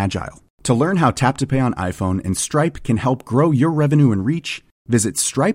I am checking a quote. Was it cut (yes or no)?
no